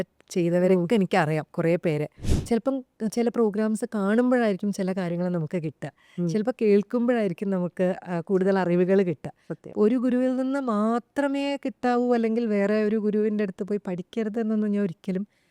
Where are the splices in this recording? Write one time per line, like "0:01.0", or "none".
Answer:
0:02.3

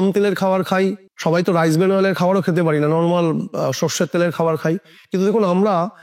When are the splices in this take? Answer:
0:01.1

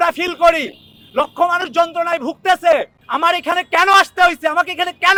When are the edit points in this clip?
none

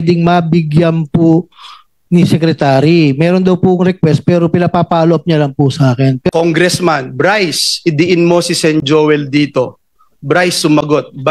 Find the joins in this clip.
0:06.2

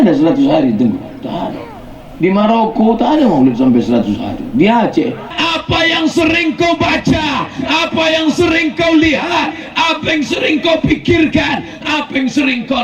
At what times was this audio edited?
0:05.3

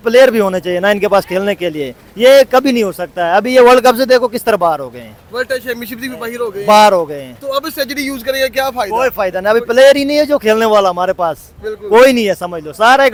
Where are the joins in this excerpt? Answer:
none

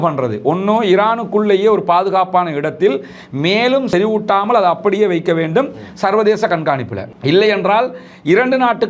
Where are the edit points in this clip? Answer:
0:03.9

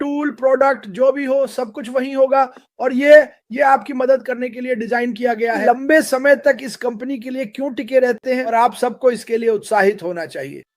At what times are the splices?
0:05.6
0:08.5

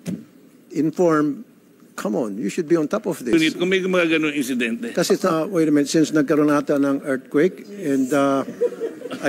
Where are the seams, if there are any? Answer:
0:03.3

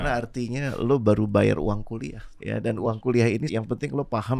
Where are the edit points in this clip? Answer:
0:02.4
0:03.5

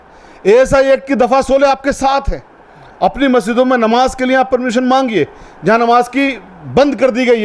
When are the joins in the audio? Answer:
none

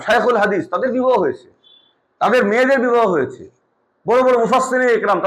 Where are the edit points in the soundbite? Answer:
none

